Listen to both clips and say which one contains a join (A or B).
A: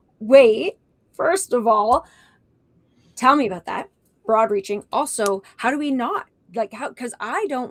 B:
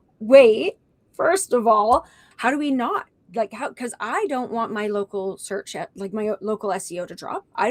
B